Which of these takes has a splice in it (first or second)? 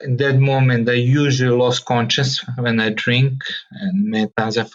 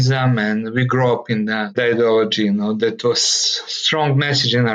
second